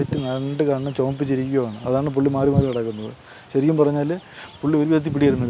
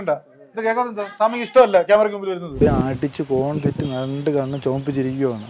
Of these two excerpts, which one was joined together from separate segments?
second; 1 cut; at 2.6 s

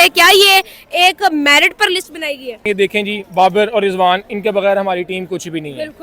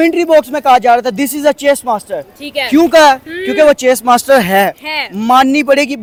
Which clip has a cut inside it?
first; 1 cut; at 2.6 s

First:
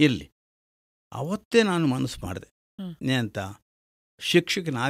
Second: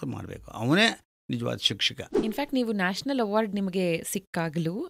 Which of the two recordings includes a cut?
second; 1 cut; at 2.0 s

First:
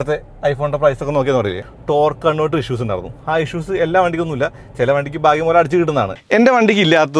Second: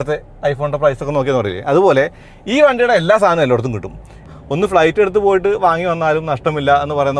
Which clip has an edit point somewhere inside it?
first; 2 cuts; at 1.6 s, 6.2 s

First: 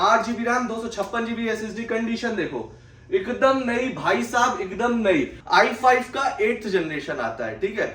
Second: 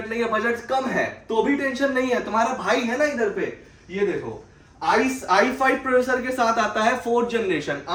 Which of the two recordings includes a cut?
first; 1 cut; at 5.4 s

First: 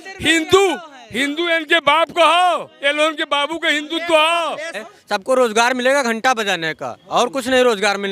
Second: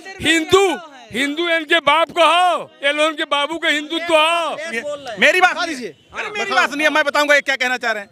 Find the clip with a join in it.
first; 1 cut; at 4.8 s

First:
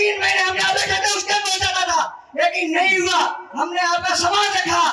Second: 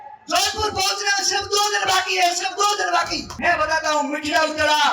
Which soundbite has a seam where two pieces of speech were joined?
second; 1 cut; at 3.3 s

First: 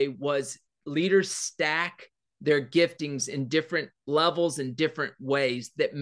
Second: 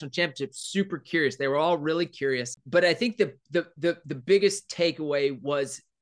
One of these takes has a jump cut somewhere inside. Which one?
second; 1 cut; at 2.6 s

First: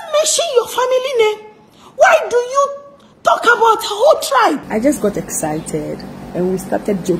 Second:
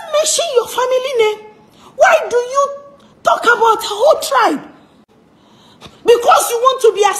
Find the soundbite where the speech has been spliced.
first; 1 cut; at 4.6 s

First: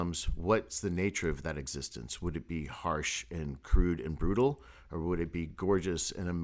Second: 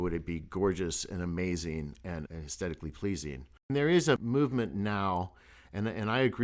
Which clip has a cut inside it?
second; 2 cuts; at 2.3 s, 3.7 s

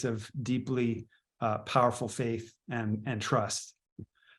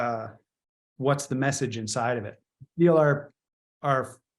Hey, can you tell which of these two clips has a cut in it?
second; 1 cut; at 2.6 s

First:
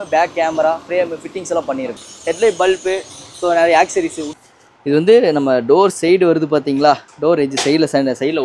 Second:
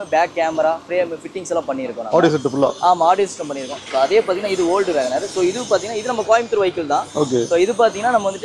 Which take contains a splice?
first; 2 cuts; at 2.0 s, 4.3 s

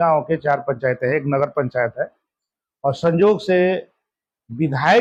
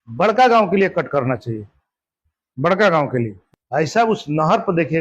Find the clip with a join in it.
second; 1 cut; at 3.4 s

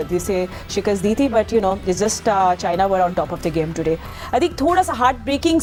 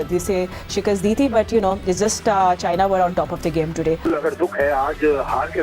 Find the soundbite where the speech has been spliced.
second; 1 cut; at 4.0 s

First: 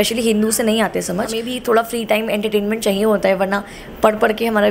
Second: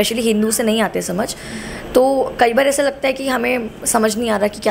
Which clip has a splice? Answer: first; 1 cut; at 1.5 s

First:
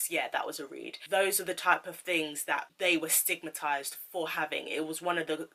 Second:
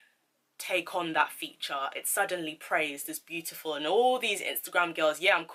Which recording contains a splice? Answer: first; 2 cuts; at 1.0 s, 2.7 s

